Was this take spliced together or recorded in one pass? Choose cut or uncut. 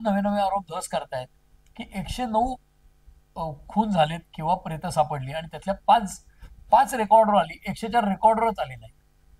uncut